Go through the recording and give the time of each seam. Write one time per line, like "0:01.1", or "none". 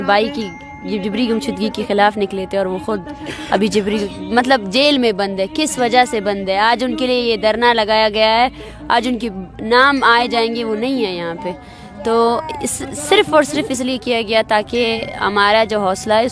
none

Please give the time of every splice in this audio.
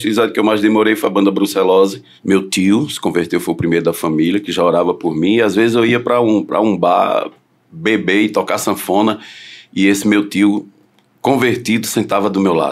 0:02.1

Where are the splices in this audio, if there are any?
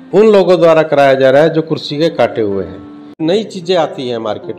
0:03.1

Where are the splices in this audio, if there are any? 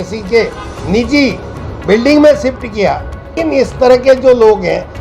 0:03.4

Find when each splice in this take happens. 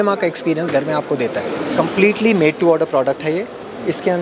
0:01.6

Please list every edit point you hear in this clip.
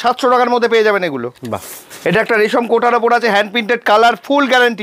none

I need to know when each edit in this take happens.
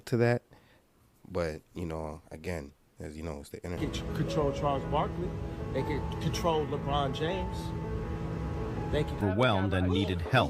0:03.8
0:09.2

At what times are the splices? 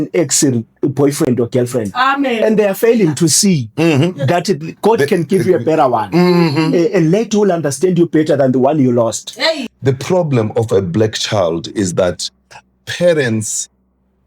0:09.6

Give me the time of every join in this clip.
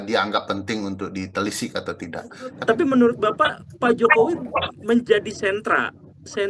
0:02.6

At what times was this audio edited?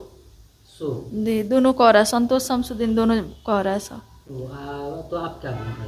none

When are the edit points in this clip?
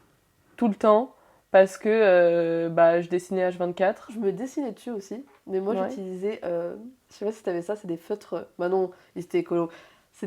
0:04.1

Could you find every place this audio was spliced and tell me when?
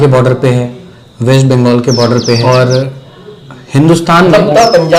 none

